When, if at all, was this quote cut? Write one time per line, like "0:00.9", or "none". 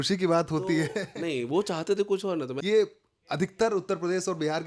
0:02.6